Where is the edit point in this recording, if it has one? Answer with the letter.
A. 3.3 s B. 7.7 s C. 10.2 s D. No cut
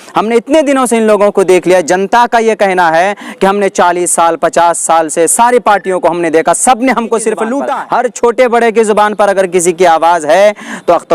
B